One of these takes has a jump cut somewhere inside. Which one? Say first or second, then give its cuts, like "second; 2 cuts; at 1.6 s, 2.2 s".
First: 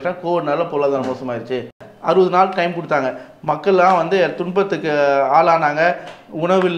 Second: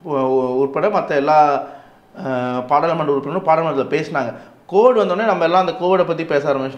first; 1 cut; at 1.9 s